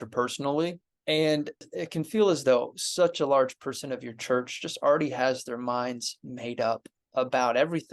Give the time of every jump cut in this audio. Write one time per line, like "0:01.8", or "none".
0:00.9
0:01.7
0:07.0